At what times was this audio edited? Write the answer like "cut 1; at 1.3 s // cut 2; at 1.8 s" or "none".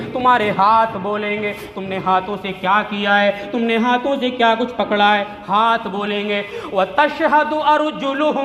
none